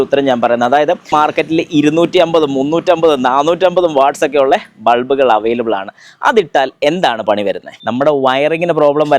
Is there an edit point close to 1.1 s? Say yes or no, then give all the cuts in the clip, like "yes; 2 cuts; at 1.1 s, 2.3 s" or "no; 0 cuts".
yes; 2 cuts; at 1.1 s, 7.7 s